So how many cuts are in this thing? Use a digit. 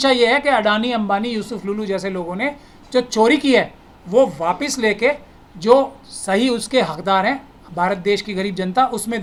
0